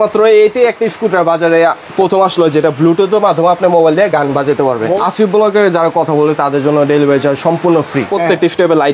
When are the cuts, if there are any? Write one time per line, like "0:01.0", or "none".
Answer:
0:05.0
0:08.1